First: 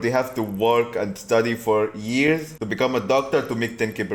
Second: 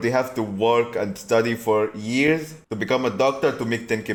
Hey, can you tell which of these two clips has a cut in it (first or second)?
first